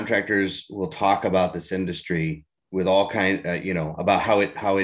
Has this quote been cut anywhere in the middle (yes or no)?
yes